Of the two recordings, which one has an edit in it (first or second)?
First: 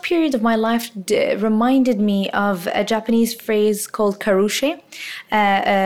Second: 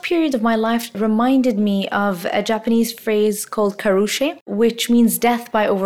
second